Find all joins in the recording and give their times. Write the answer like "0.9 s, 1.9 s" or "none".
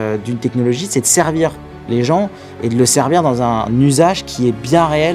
3.7 s